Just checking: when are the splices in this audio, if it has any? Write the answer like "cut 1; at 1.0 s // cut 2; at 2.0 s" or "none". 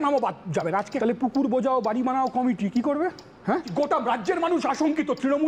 cut 1; at 0.9 s // cut 2; at 3.7 s